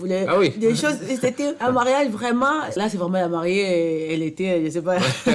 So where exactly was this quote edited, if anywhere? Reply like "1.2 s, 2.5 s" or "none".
1.6 s, 2.8 s